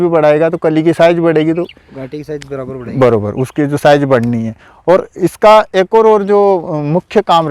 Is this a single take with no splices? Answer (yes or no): yes